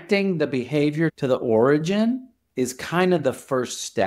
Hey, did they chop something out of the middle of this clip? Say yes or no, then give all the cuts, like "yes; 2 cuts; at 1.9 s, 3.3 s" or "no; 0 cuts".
yes; 1 cut; at 1.1 s